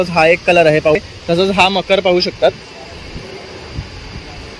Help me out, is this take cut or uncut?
cut